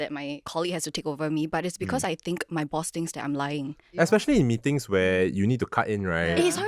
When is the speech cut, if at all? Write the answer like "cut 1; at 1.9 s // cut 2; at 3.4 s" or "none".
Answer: cut 1; at 3.9 s